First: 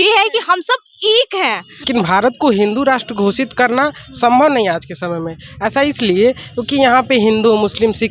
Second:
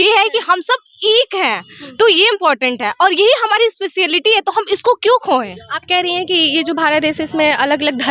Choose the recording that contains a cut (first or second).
first